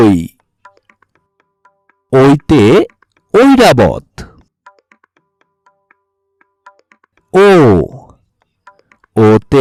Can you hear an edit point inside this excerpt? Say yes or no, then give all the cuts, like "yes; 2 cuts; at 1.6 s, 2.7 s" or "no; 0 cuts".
no; 0 cuts